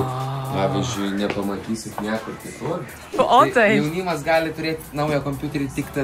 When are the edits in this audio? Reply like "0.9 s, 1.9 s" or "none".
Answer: 3.2 s

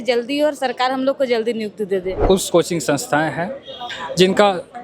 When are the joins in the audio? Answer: 2.2 s

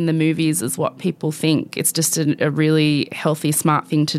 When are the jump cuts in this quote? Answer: none

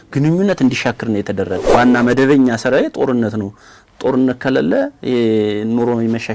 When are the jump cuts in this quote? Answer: 1.6 s

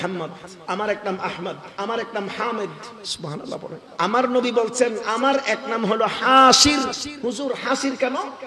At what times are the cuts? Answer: 3.8 s, 7.1 s

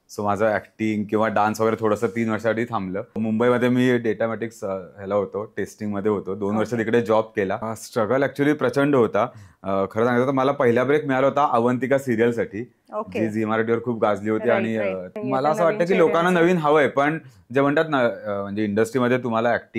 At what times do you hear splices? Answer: 3.2 s, 7.7 s, 15.1 s

